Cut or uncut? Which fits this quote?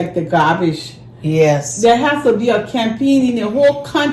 uncut